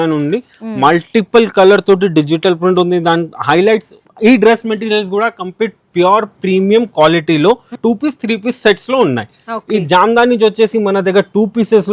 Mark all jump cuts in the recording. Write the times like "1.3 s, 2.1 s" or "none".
4.0 s, 7.8 s